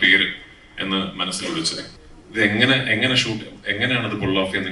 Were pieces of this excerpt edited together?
yes; 1 cut; at 1.9 s

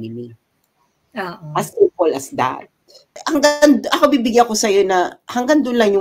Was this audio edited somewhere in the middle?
yes; 1 cut; at 3.1 s

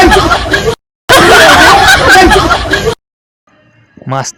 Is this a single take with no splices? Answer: yes; 0 cuts

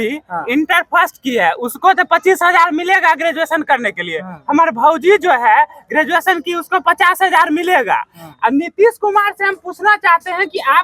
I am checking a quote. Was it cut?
no; 0 cuts

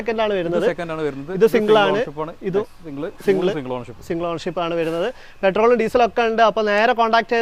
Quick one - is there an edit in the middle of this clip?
no; 0 cuts

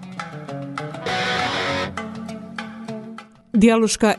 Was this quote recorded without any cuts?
no; 1 cut; at 1.0 s

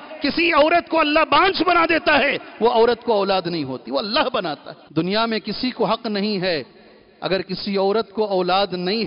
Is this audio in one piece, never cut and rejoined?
no; 1 cut; at 4.7 s

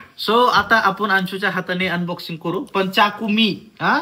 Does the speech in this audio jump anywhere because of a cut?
no; 0 cuts

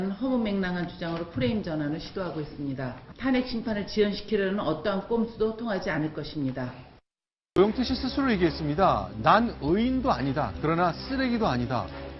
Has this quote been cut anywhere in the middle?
yes; 1 cut; at 7.3 s

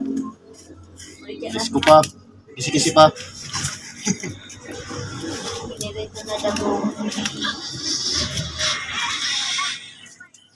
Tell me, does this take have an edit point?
no; 0 cuts

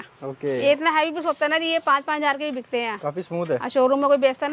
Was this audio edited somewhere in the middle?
no; 0 cuts

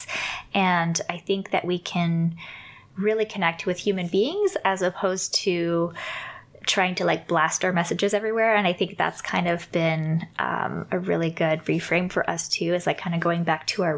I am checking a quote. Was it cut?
no; 0 cuts

